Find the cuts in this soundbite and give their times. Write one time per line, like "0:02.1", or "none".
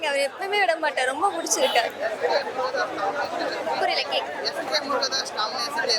none